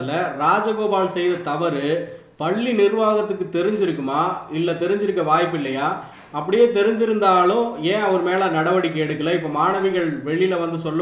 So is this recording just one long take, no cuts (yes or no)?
yes